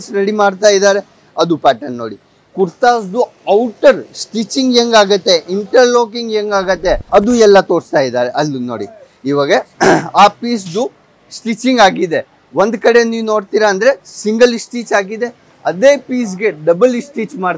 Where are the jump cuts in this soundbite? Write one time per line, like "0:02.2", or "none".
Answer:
0:07.0